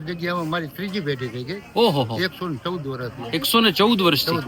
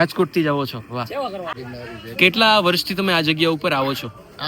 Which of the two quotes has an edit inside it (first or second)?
second